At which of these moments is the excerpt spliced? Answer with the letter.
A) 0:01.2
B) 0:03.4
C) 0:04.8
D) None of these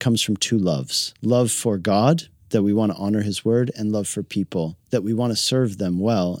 D